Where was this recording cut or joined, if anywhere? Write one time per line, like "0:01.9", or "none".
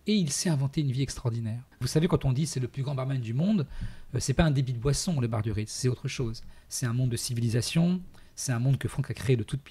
0:01.8